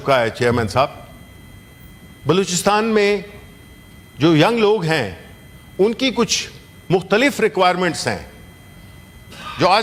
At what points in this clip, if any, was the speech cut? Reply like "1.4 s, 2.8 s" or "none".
none